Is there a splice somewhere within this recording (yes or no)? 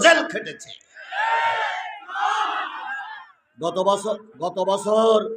yes